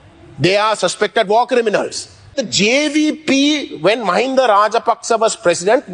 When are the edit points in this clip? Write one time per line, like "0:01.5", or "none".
0:02.4